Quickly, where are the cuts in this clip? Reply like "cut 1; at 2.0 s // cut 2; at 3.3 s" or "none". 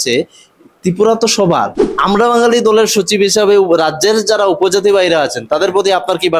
cut 1; at 1.9 s